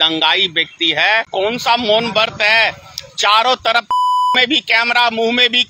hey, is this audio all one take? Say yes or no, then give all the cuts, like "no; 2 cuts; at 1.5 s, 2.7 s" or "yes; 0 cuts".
no; 1 cut; at 1.3 s